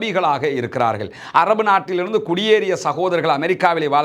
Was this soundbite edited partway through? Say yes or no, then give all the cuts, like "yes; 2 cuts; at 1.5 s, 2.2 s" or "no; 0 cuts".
no; 0 cuts